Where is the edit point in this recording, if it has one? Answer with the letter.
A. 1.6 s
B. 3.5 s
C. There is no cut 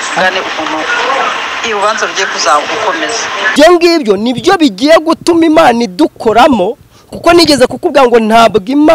B